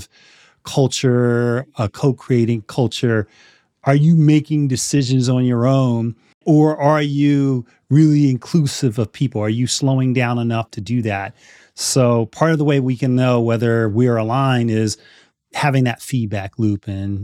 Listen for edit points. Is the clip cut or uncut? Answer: uncut